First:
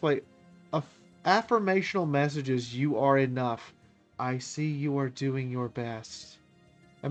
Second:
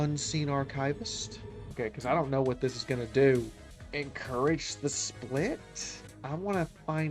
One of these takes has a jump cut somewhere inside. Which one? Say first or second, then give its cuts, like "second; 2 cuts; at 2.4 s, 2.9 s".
second; 1 cut; at 1.6 s